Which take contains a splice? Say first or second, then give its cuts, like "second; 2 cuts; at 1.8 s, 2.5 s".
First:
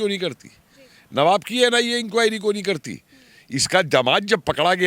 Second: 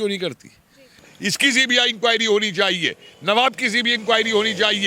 second; 1 cut; at 1.1 s